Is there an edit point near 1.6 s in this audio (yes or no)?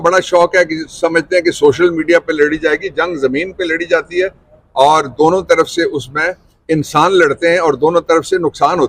no